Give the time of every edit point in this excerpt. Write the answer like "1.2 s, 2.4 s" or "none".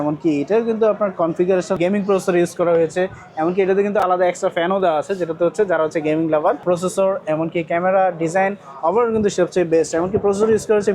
1.8 s, 6.6 s